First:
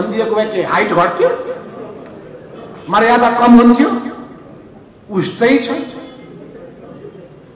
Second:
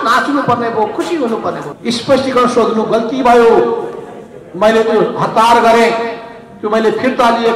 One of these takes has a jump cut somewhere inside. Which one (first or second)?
second